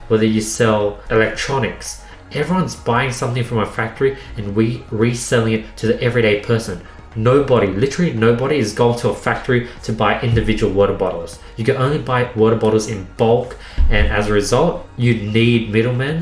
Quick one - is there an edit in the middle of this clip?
no; 0 cuts

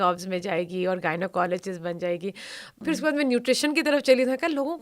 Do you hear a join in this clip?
yes; 1 cut; at 2.6 s

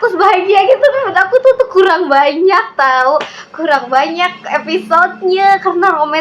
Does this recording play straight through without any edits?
yes; 0 cuts

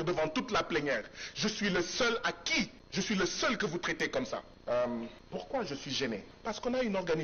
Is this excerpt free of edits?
no; 4 cuts; at 2.8 s, 4.5 s, 5.2 s, 6.3 s

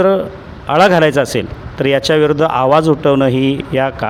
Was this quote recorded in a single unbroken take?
yes; 0 cuts

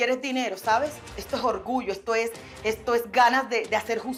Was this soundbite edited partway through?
no; 0 cuts

